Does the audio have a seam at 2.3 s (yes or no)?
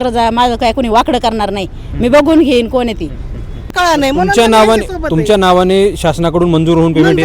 no